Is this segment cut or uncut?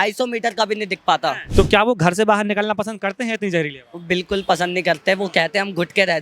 cut